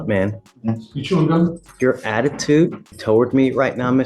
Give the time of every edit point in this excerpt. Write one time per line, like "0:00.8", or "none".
0:01.6
0:02.9